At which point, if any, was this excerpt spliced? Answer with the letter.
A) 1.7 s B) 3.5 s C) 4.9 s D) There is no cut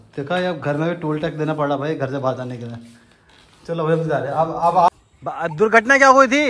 C